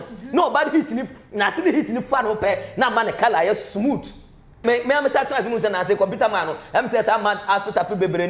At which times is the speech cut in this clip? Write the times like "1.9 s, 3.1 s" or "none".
4.6 s